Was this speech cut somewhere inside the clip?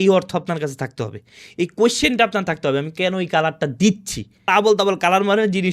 yes; 1 cut; at 4.5 s

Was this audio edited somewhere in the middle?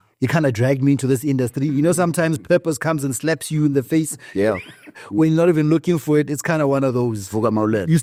no; 0 cuts

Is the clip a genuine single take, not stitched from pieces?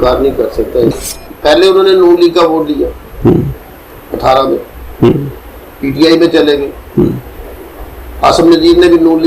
no; 1 cut; at 1.1 s

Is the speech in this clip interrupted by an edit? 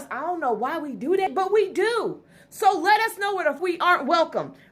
yes; 2 cuts; at 1.3 s, 3.6 s

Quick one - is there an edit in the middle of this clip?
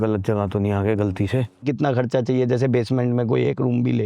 yes; 1 cut; at 1.6 s

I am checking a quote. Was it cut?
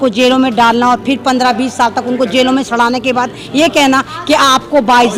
no; 0 cuts

